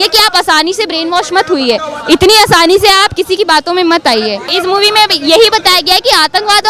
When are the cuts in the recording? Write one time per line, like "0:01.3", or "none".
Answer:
0:04.5